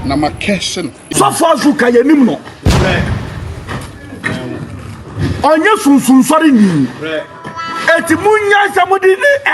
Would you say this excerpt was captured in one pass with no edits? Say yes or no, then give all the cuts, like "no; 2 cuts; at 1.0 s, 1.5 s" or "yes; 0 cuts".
no; 1 cut; at 1.0 s